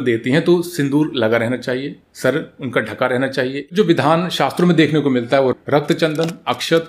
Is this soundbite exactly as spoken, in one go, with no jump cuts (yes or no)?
no